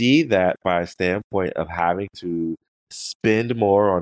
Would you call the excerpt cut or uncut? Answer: cut